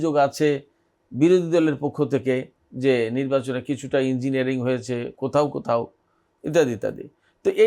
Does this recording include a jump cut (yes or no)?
no